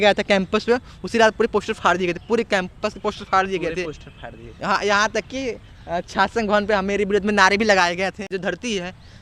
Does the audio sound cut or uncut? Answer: cut